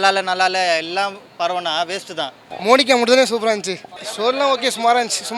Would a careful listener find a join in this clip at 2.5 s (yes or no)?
yes